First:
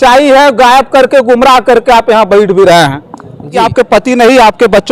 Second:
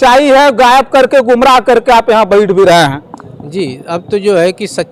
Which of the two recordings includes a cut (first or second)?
first